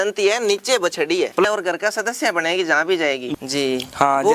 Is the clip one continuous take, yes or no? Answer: no